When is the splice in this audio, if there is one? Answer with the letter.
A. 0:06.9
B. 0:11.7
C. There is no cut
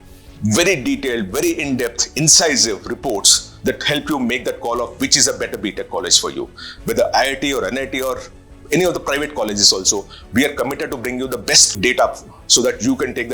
B